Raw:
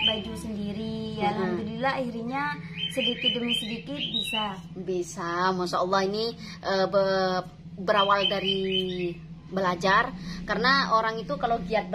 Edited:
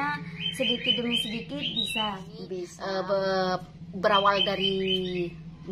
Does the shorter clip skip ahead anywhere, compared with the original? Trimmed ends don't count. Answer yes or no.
yes